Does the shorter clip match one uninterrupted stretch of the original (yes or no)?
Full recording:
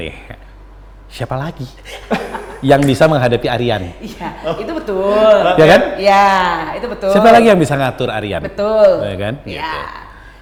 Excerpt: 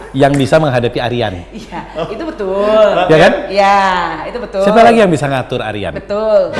yes